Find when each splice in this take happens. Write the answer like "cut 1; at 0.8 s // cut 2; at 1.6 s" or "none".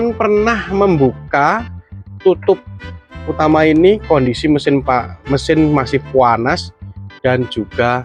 none